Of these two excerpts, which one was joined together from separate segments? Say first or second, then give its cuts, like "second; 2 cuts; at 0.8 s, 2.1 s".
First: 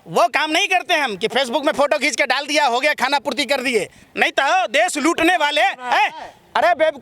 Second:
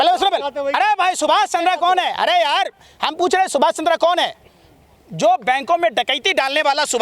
first; 1 cut; at 4.0 s